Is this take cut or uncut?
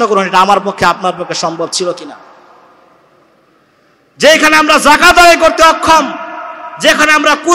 uncut